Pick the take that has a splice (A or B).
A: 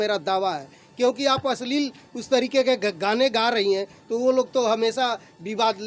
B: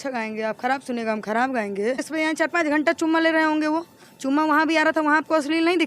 B